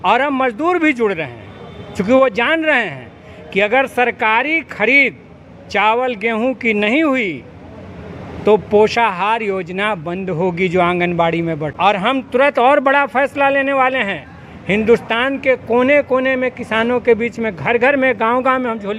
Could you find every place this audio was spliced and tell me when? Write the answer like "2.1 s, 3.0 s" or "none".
11.7 s